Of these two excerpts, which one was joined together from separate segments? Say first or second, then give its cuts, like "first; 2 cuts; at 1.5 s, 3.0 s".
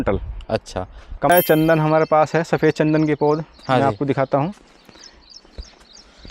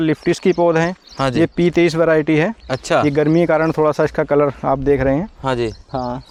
first; 1 cut; at 1.3 s